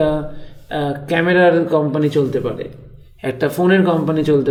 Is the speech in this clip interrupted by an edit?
no; 0 cuts

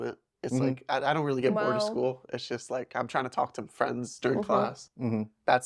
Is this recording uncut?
yes; 0 cuts

